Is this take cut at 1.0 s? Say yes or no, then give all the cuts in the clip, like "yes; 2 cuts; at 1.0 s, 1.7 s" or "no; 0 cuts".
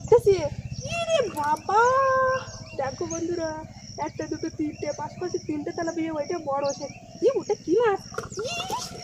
yes; 1 cut; at 1.0 s